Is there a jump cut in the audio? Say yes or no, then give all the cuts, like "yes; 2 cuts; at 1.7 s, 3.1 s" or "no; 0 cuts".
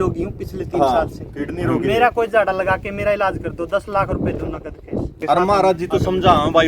yes; 1 cut; at 5.2 s